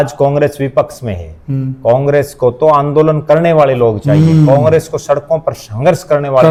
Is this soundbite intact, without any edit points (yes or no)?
yes